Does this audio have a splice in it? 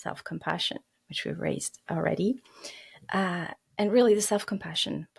no; 0 cuts

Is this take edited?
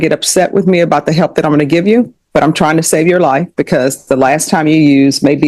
no; 0 cuts

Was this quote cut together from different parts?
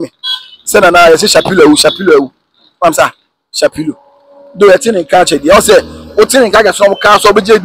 no; 0 cuts

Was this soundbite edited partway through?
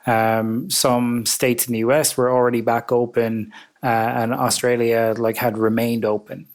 no; 0 cuts

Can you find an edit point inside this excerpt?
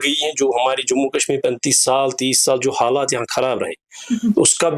no; 0 cuts

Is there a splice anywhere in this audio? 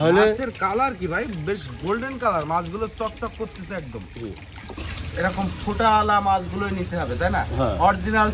yes; 1 cut; at 4.8 s

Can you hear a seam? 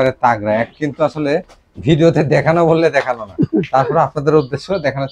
no; 0 cuts

